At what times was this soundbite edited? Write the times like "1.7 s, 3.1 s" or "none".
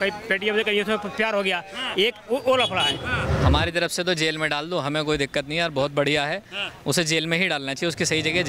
3.3 s